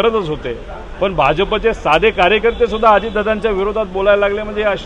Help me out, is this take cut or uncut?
uncut